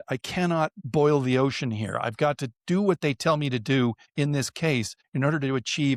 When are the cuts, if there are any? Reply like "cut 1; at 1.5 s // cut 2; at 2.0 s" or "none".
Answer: none